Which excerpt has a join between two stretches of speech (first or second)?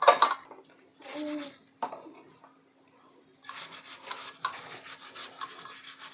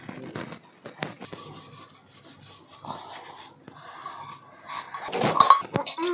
second